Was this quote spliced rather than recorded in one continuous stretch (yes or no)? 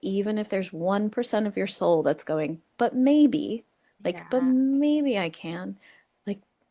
no